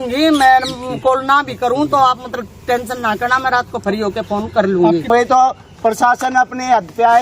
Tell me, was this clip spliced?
yes; 1 cut; at 5.1 s

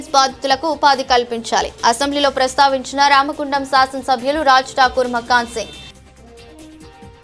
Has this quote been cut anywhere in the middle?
no; 0 cuts

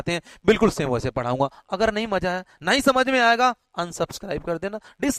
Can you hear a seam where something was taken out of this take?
no; 0 cuts

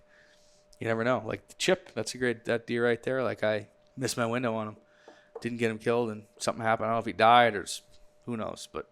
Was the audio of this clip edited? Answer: yes; 1 cut; at 3.8 s

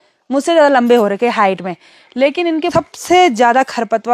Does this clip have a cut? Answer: yes; 1 cut; at 2.7 s

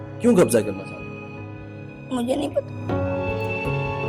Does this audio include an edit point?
no; 0 cuts

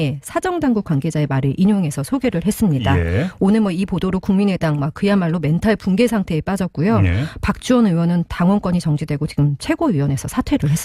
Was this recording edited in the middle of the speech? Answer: yes; 1 cut; at 4.1 s

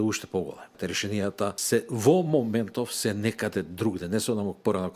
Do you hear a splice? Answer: yes; 1 cut; at 1.1 s

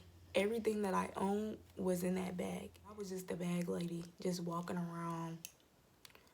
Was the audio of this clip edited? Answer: yes; 1 cut; at 3.0 s

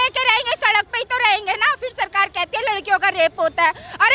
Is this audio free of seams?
yes; 0 cuts

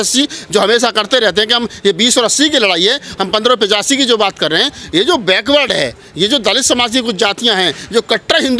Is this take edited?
no; 0 cuts

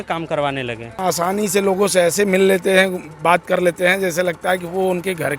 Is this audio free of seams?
no; 1 cut; at 1.0 s

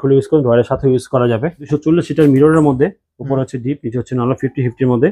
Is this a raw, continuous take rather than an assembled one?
no; 1 cut; at 1.6 s

